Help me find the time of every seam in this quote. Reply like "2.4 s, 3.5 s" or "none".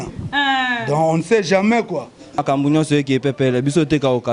2.4 s